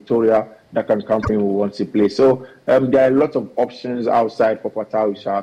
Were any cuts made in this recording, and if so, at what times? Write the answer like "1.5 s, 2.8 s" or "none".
1.2 s